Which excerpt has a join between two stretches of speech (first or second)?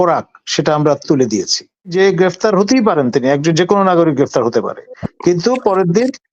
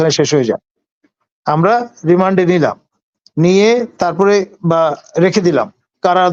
first